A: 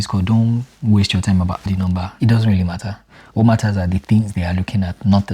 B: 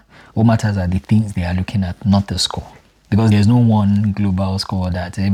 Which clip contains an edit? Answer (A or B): A